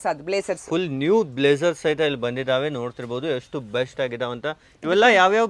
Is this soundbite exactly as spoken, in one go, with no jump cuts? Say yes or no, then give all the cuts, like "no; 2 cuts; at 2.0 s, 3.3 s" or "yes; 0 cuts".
yes; 0 cuts